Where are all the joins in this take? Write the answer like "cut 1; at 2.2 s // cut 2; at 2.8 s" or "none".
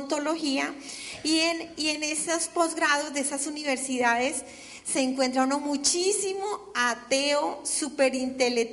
cut 1; at 3.7 s